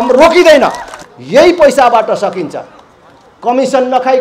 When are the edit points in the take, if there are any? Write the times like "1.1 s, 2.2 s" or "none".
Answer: 1.0 s